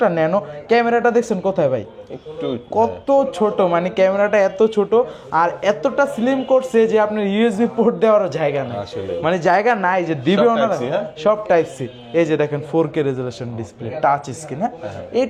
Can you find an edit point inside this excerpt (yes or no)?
no